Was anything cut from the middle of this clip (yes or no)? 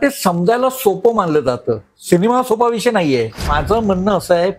yes